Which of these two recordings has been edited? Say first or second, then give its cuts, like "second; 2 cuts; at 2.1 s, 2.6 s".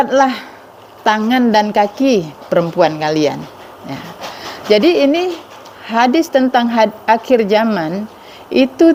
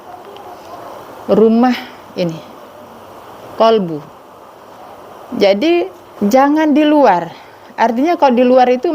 second; 1 cut; at 6.0 s